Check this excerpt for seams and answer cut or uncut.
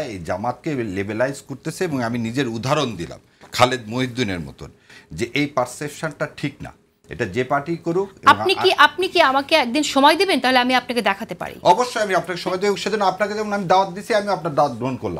uncut